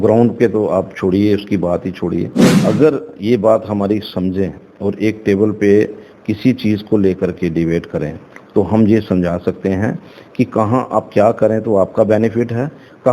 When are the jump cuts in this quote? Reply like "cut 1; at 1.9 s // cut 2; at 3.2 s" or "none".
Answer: cut 1; at 2.5 s